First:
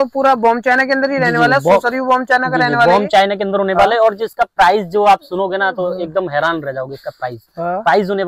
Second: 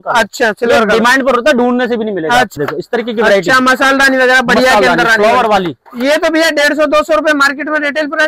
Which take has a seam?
second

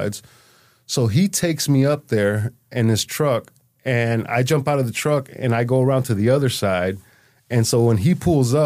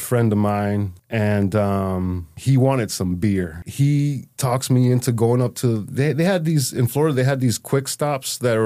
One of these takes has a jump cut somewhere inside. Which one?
second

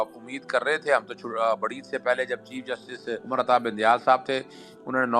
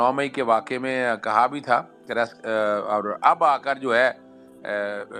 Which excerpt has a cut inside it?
first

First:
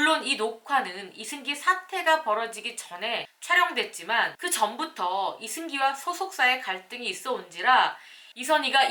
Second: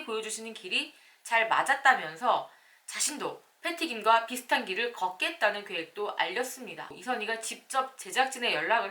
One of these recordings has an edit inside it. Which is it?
second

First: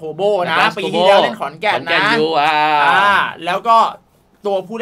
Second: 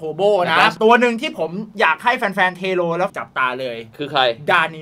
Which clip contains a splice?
second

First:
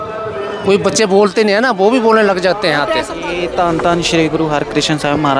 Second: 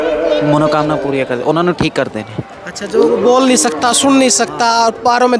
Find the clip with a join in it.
first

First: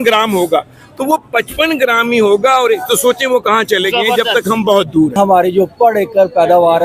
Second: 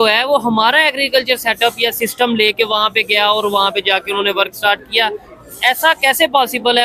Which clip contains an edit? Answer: first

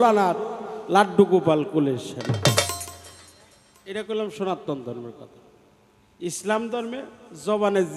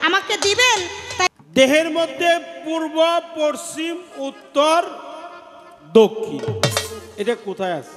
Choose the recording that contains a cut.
second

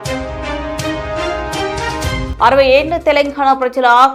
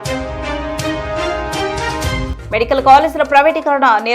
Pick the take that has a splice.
second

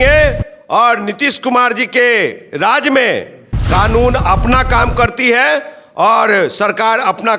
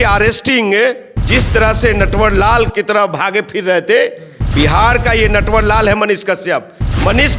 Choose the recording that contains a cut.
second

